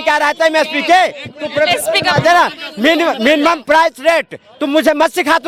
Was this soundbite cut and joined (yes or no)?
no